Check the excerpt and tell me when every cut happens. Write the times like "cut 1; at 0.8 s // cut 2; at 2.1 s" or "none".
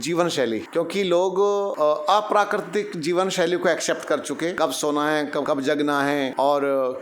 cut 1; at 1.7 s // cut 2; at 4.5 s // cut 3; at 5.8 s